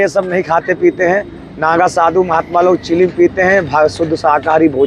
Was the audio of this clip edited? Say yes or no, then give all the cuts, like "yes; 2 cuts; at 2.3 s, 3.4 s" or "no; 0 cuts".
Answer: no; 0 cuts